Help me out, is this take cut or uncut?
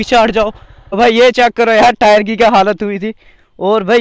cut